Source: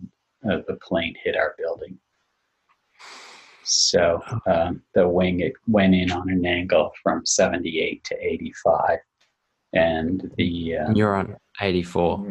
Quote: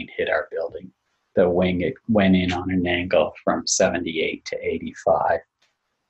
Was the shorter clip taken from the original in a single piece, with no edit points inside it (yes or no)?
no